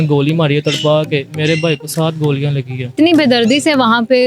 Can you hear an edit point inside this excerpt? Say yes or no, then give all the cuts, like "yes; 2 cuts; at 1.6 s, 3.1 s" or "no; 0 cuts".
yes; 1 cut; at 2.8 s